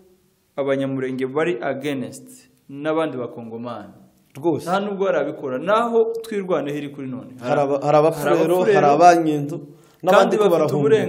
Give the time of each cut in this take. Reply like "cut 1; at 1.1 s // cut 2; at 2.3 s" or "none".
none